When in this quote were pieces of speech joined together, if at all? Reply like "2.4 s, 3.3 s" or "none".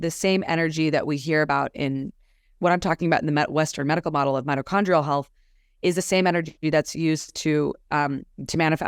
none